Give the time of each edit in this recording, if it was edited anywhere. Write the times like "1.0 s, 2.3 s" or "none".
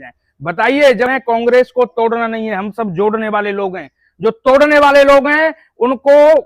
1.1 s